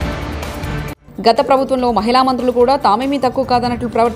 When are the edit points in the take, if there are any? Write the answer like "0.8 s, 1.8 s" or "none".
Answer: 0.9 s